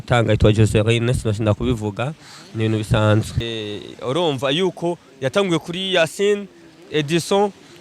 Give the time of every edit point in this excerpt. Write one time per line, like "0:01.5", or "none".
0:03.4